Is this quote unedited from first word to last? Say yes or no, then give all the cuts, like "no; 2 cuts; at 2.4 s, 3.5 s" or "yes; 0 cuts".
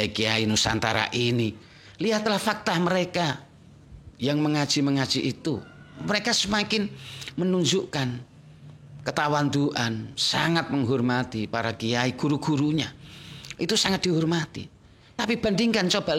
yes; 0 cuts